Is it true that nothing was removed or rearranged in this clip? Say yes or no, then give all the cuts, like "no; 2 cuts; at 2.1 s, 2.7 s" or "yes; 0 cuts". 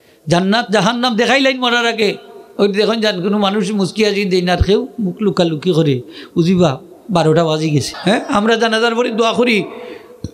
no; 1 cut; at 7.9 s